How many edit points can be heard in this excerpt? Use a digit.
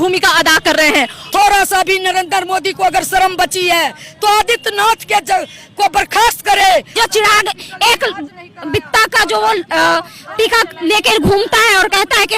2